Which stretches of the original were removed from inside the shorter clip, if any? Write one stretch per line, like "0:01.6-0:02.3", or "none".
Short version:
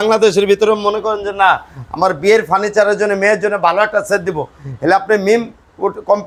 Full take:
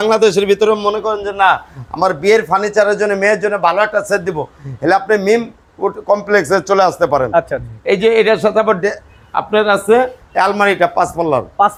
none